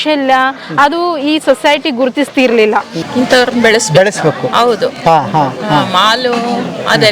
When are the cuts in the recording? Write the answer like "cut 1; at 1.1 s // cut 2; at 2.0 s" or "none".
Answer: cut 1; at 3.0 s